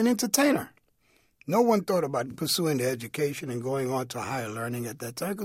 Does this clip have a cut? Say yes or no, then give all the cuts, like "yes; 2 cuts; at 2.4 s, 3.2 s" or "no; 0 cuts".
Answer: yes; 1 cut; at 2.3 s